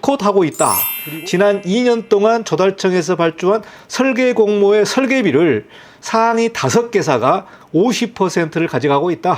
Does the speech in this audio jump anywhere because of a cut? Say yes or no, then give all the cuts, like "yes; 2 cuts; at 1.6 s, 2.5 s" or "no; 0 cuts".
yes; 1 cut; at 0.9 s